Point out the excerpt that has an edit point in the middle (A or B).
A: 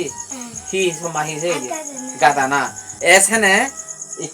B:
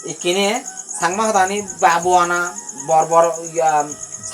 A